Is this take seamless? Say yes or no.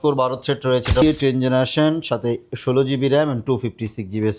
no